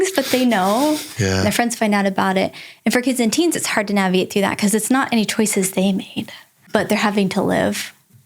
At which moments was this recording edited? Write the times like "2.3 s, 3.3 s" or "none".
1.2 s, 6.6 s